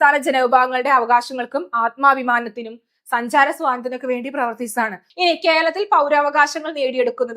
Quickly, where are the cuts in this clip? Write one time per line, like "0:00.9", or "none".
0:05.0